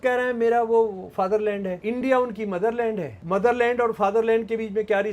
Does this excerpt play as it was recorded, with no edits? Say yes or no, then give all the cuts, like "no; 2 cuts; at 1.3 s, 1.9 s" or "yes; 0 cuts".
no; 2 cuts; at 1.8 s, 3.1 s